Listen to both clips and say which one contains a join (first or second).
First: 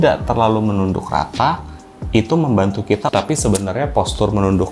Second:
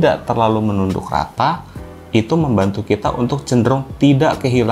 first